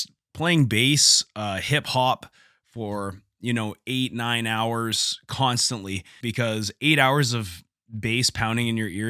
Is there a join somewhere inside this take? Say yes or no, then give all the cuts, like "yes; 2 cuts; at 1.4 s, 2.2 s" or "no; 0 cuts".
yes; 1 cut; at 6.2 s